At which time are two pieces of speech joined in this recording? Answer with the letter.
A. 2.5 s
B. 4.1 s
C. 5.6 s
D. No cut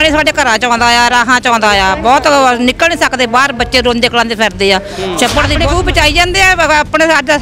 C